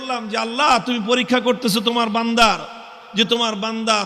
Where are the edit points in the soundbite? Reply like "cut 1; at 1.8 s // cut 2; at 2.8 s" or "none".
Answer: none